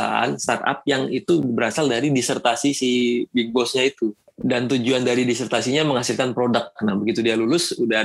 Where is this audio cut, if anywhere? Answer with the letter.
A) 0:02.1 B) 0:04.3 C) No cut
B